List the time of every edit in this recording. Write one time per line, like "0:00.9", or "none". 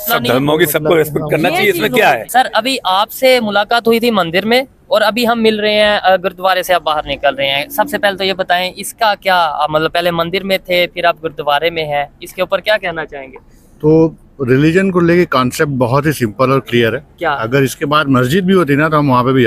0:02.2